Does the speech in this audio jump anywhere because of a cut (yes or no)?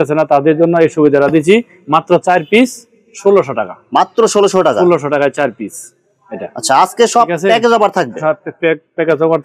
no